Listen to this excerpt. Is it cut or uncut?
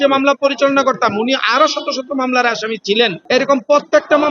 uncut